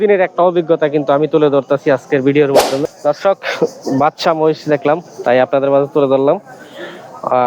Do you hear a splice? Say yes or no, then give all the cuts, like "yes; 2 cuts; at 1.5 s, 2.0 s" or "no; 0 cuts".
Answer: yes; 1 cut; at 2.6 s